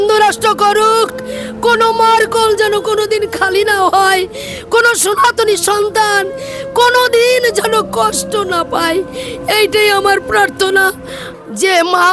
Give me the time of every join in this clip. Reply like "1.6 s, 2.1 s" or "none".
11.2 s